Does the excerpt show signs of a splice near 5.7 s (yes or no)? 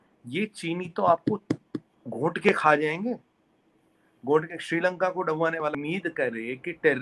yes